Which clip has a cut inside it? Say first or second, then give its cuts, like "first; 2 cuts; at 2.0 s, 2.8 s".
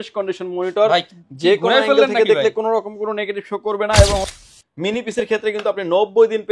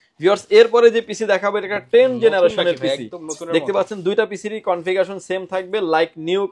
first; 1 cut; at 4.4 s